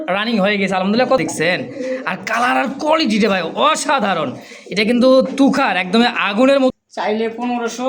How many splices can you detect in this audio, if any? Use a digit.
2